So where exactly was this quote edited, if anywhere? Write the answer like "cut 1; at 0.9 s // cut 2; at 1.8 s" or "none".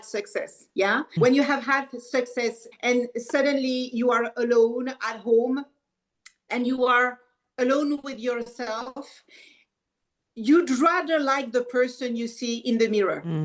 cut 1; at 1.2 s // cut 2; at 2.6 s

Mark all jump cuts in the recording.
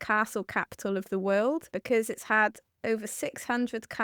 cut 1; at 1.7 s

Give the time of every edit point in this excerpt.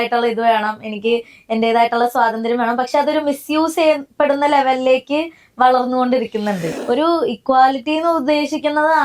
cut 1; at 6.7 s

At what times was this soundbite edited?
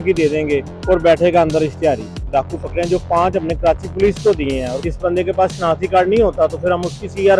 cut 1; at 2.2 s // cut 2; at 4.8 s

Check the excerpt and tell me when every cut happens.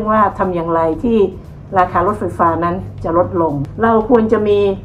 cut 1; at 3.6 s

